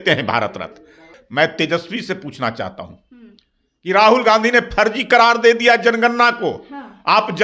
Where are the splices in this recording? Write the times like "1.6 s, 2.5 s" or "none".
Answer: 1.1 s

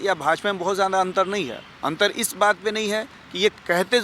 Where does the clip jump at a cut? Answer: 1.6 s

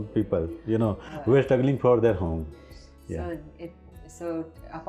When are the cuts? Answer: none

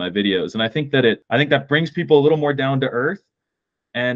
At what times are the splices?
1.2 s

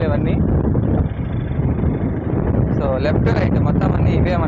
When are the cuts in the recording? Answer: none

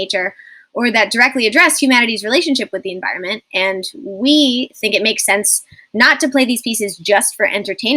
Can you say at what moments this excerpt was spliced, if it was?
none

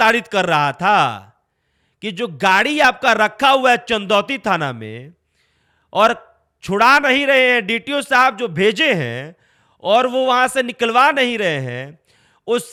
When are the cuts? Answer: none

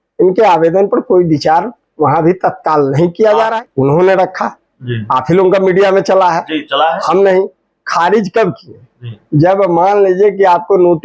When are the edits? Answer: 3.6 s

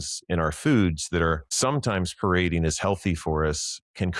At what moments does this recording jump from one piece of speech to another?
1.5 s

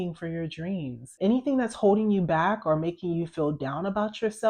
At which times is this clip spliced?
1.1 s

